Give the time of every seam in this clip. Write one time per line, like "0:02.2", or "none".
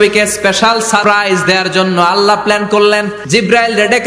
0:01.0
0:03.2